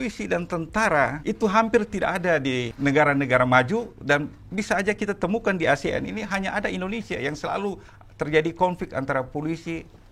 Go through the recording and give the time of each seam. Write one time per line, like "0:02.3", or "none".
0:01.2
0:02.7